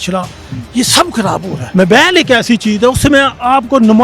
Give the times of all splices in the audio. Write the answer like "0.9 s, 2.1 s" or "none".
1.6 s

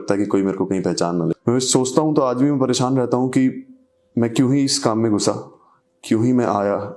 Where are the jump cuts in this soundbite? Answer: none

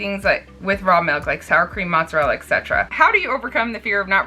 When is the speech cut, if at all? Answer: 2.9 s

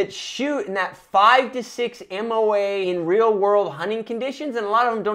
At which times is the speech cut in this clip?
2.8 s

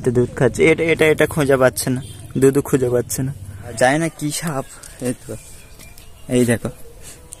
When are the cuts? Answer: 3.8 s

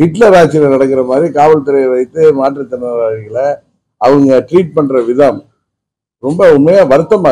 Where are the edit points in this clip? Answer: none

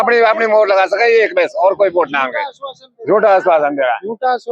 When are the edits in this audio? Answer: none

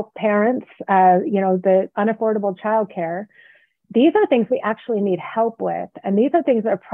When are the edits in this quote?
none

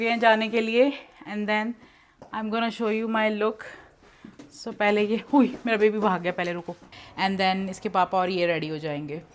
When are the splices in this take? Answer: 6.9 s

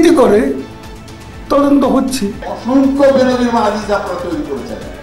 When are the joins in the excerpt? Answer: 2.4 s

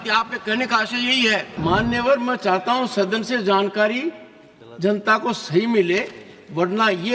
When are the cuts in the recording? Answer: 1.5 s

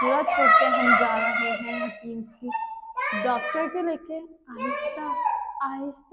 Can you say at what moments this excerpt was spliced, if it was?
none

